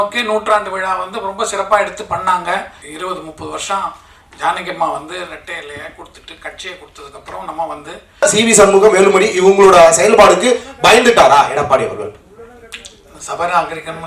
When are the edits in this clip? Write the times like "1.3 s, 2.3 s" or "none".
2.8 s, 8.2 s